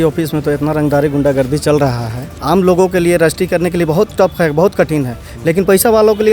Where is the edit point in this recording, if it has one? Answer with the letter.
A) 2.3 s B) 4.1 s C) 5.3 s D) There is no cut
A